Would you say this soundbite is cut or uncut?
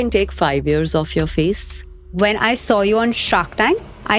cut